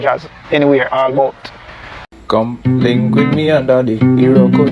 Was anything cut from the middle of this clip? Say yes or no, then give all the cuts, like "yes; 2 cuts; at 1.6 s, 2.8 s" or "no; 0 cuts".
yes; 1 cut; at 2.1 s